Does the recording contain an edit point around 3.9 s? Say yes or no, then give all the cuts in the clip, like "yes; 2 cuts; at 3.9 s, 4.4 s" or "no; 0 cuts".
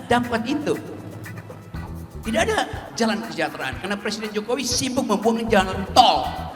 no; 0 cuts